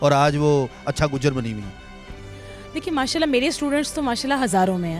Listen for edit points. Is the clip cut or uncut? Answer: uncut